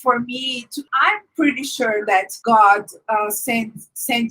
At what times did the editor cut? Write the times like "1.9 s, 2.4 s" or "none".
0.9 s, 2.3 s